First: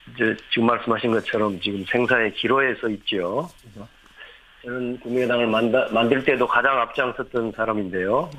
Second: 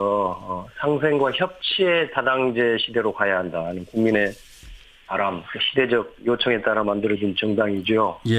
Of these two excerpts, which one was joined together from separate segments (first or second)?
second